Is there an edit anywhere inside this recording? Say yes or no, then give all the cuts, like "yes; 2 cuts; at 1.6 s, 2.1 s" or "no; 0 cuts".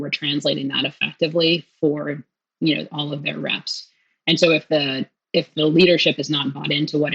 no; 0 cuts